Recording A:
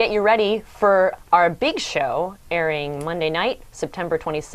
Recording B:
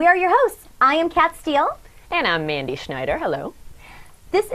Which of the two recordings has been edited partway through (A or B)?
B